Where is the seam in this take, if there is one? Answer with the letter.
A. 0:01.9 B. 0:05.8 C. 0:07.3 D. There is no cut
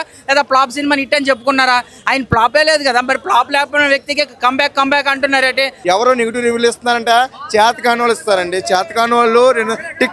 B